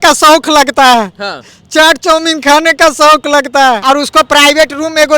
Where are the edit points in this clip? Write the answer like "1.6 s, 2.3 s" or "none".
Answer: 3.8 s